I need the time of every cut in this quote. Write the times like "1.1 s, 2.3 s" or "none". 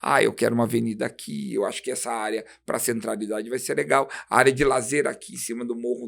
none